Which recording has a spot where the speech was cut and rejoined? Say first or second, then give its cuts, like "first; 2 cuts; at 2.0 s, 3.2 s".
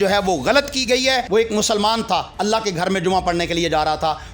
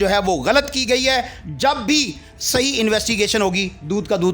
first; 1 cut; at 1.2 s